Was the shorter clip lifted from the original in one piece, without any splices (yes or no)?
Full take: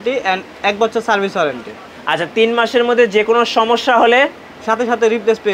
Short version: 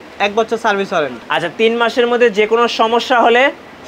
no